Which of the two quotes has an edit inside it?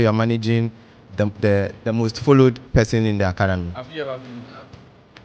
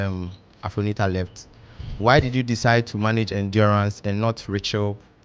first; 2 cuts; at 1.7 s, 3.7 s

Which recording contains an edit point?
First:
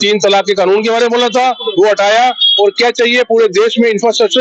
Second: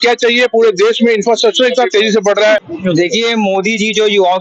second; 1 cut; at 2.6 s

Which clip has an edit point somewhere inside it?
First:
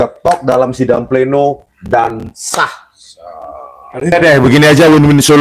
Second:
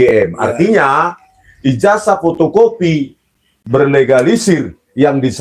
first; 1 cut; at 4.1 s

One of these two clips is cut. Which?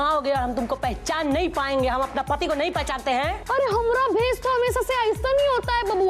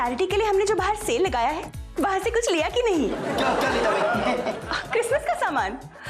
first; 1 cut; at 3.4 s

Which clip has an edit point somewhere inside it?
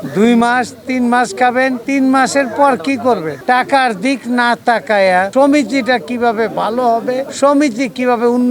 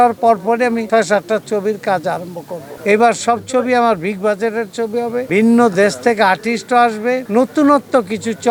first; 3 cuts; at 3.4 s, 5.3 s, 7.3 s

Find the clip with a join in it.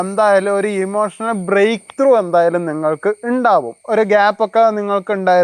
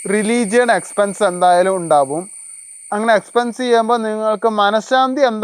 first; 1 cut; at 3.8 s

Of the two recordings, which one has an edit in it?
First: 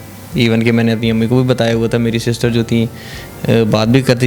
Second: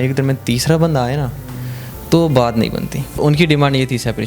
second; 1 cut; at 3.2 s

